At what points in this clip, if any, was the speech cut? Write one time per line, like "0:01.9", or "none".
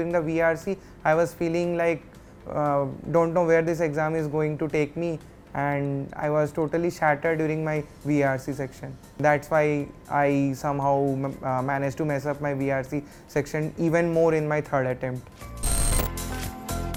none